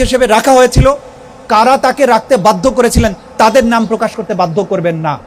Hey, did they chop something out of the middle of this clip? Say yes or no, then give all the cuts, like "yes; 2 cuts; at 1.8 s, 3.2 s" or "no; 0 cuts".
no; 0 cuts